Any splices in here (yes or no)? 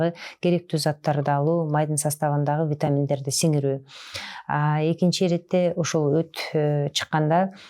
no